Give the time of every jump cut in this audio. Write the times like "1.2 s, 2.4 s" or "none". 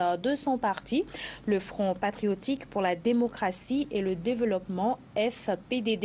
none